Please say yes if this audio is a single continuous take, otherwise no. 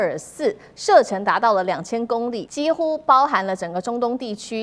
no